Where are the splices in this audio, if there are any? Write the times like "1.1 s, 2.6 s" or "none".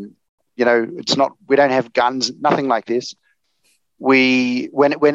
none